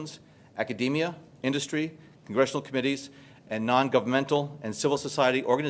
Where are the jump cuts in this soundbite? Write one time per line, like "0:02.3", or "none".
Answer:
none